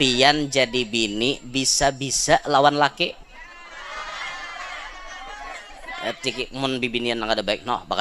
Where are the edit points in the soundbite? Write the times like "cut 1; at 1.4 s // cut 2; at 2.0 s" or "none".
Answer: cut 1; at 6.4 s